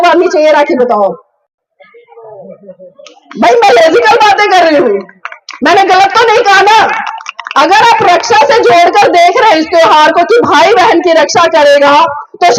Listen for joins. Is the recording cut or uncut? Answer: uncut